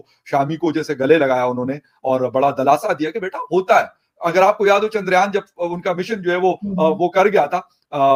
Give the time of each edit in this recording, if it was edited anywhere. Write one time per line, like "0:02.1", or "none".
none

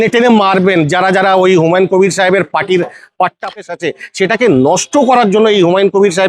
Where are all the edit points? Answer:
0:03.6

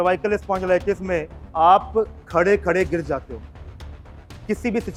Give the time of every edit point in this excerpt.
none

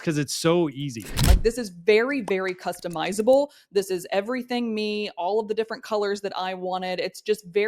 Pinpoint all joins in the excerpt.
0:01.2

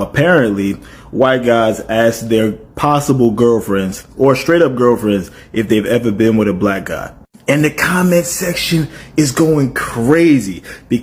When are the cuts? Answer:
none

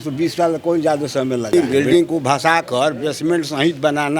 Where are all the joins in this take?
0:01.5

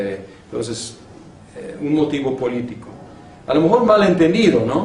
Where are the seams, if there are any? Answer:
none

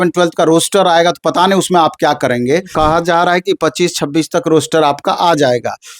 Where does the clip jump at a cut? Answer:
0:02.7

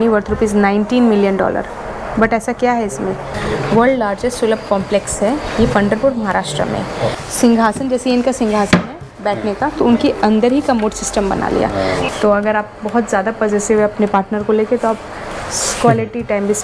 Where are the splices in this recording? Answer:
0:03.3
0:07.1
0:12.1

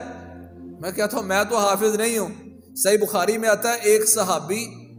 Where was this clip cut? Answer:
none

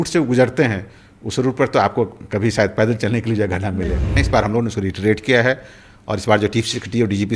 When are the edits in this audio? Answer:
0:04.2

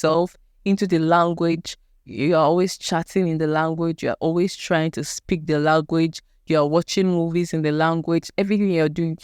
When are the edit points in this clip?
none

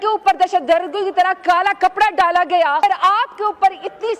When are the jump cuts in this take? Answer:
0:02.8

